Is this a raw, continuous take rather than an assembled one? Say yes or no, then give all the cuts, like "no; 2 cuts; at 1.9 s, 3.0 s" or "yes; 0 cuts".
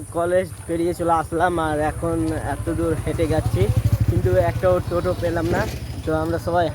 yes; 0 cuts